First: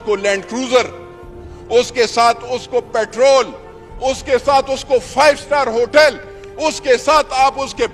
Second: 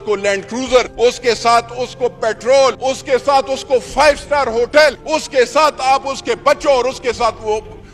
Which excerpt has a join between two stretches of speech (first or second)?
second